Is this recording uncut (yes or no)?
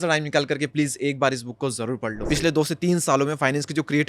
no